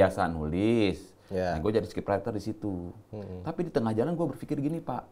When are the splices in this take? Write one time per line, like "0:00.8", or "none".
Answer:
none